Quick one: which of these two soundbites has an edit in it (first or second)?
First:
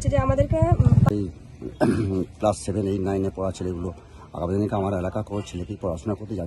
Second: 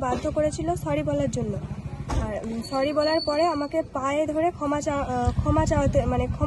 first